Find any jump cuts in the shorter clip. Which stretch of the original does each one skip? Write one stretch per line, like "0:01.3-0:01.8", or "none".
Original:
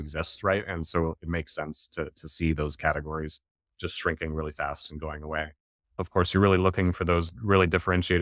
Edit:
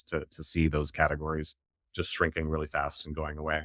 none